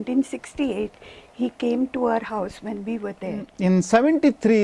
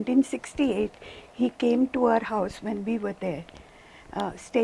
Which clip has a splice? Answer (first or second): first